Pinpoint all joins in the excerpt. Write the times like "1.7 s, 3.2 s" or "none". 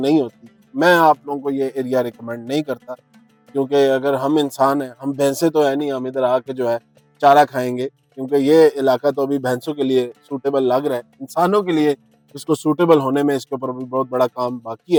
none